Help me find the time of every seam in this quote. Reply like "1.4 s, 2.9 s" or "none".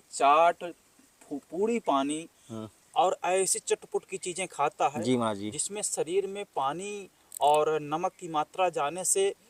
none